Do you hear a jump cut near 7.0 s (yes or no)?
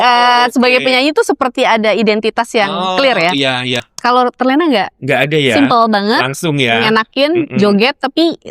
no